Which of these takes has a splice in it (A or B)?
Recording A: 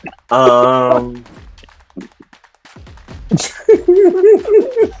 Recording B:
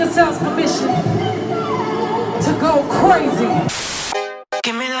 B